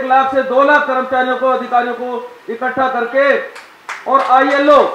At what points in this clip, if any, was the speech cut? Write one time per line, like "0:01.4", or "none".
none